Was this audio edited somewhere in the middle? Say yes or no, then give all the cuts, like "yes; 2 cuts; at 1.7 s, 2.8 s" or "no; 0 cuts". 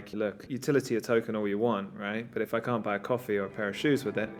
no; 0 cuts